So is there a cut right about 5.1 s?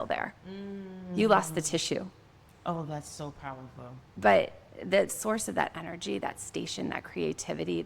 yes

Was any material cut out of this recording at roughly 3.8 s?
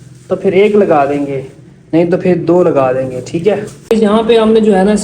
yes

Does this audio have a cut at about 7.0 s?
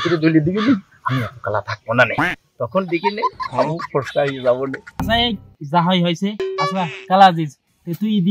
no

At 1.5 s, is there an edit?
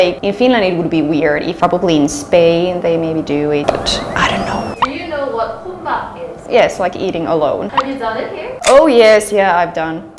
yes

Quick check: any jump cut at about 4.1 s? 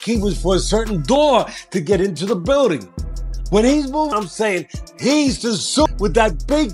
yes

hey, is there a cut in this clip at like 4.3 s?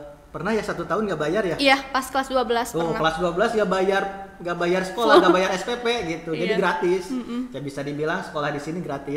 no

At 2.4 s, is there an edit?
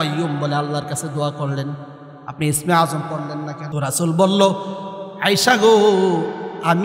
no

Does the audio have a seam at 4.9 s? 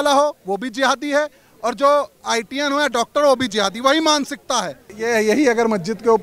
yes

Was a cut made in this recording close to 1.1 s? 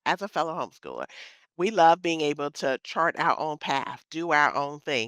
no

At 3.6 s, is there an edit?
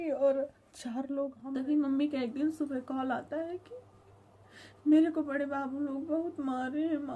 no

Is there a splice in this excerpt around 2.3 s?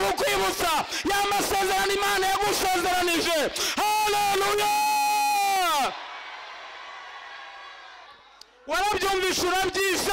no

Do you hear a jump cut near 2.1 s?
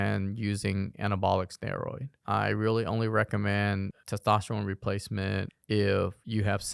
yes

